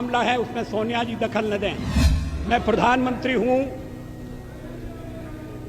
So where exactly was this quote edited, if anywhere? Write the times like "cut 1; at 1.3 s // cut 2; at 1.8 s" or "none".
cut 1; at 2.3 s